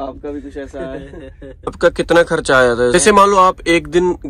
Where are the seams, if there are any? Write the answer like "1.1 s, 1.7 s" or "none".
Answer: 1.7 s, 2.9 s